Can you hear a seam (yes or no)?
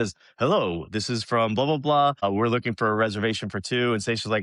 yes